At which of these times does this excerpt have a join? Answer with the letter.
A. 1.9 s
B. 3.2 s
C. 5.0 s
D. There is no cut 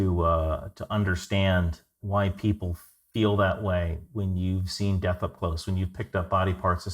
A